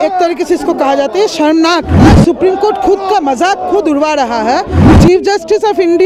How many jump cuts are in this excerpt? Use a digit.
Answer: 2